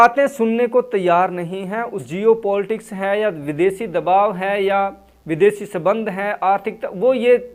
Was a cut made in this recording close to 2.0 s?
yes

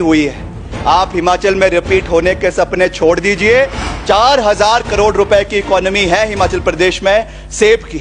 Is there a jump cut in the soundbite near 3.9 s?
yes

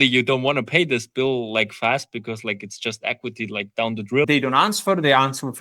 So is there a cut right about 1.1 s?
no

